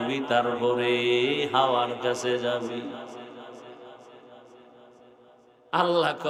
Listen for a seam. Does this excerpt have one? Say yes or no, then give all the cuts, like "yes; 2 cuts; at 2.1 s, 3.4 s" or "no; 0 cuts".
no; 0 cuts